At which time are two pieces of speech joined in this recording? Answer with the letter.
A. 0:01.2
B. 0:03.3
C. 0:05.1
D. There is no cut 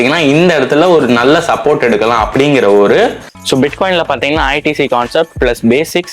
B